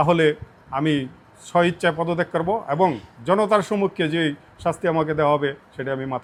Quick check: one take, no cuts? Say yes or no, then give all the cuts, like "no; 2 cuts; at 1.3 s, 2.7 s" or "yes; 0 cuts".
yes; 0 cuts